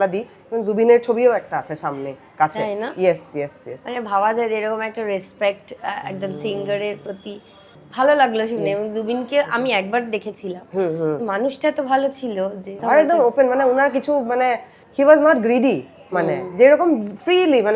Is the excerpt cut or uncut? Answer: uncut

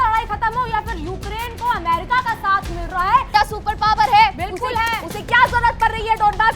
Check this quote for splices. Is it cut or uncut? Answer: cut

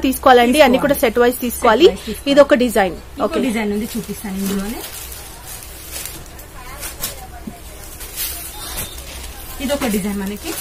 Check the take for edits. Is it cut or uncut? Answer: uncut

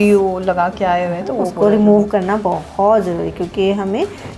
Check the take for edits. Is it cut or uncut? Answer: uncut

